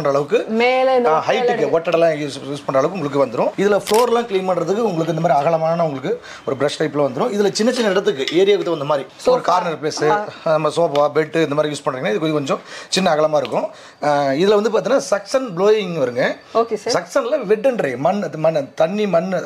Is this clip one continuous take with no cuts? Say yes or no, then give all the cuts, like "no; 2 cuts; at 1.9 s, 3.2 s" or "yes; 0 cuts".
yes; 0 cuts